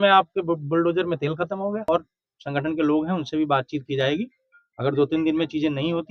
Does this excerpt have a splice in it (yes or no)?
yes